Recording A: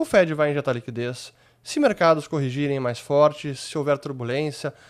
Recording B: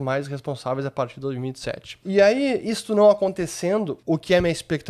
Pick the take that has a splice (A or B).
B